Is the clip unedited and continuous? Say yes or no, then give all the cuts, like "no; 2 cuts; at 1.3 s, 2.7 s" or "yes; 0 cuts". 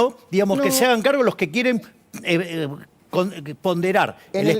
yes; 0 cuts